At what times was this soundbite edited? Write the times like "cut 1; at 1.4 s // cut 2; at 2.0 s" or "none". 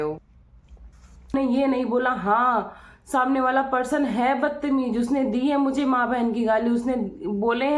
cut 1; at 1.3 s